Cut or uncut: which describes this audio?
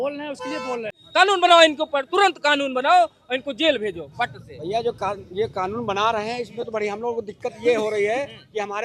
cut